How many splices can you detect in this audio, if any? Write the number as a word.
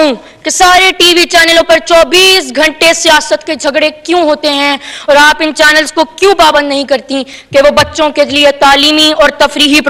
zero